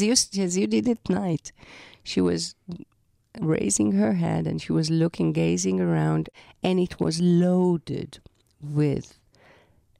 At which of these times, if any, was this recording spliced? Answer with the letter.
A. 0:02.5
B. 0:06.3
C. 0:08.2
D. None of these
B